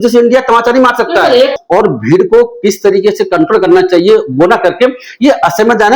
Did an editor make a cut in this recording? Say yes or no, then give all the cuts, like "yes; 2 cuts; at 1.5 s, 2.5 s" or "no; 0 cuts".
yes; 1 cut; at 1.5 s